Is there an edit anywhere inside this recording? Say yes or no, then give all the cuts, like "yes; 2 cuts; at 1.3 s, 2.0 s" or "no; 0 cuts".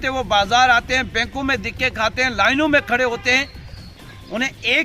yes; 1 cut; at 3.9 s